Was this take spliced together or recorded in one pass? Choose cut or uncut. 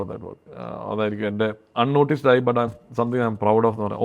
uncut